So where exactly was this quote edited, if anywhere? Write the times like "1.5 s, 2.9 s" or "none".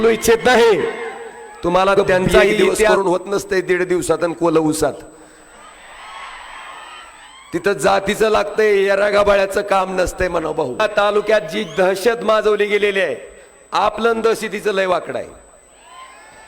2.8 s, 10.8 s